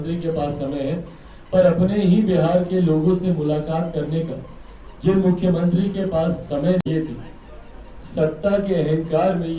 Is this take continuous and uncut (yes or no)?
no